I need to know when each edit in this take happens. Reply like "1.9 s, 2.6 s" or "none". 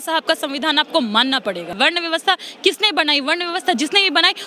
1.7 s